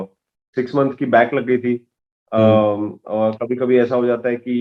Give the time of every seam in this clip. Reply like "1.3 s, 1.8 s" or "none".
none